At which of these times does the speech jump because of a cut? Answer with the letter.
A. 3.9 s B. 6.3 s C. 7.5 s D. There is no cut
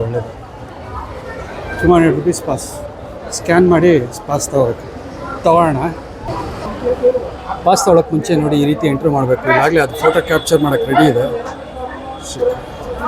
B